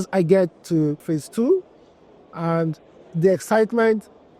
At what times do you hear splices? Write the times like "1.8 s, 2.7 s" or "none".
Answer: 1.0 s